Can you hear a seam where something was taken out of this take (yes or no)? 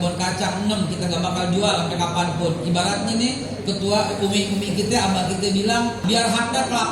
yes